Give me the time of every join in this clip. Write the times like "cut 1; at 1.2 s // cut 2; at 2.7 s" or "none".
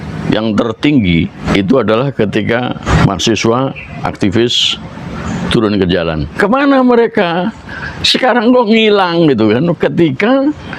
cut 1; at 1.4 s // cut 2; at 2.9 s // cut 3; at 6.3 s